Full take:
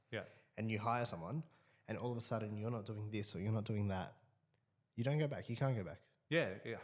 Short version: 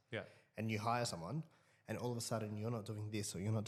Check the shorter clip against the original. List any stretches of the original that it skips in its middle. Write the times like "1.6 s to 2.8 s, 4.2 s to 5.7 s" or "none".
none